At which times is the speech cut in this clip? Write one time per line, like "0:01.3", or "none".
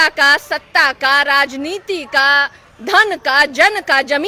none